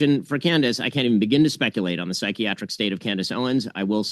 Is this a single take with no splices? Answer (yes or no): yes